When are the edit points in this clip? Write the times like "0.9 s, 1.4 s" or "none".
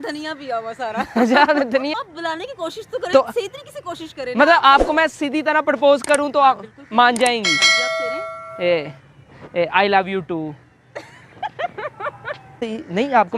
1.9 s, 12.6 s